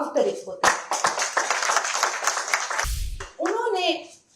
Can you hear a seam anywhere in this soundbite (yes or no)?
yes